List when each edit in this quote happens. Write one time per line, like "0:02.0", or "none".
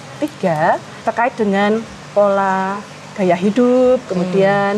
0:00.9